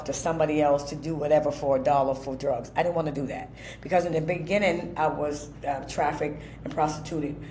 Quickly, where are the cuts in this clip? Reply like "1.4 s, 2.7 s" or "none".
none